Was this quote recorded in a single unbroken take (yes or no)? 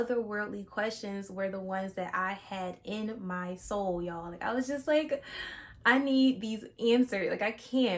yes